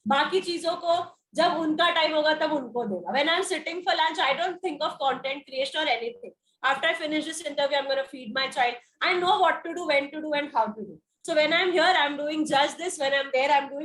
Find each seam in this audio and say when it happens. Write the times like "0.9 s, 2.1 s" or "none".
none